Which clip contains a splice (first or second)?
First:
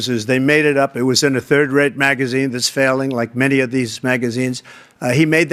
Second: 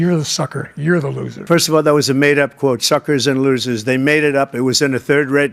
second